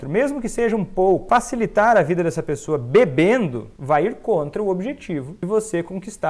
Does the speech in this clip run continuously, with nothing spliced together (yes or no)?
no